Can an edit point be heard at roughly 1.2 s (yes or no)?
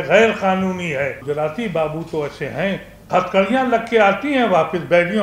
yes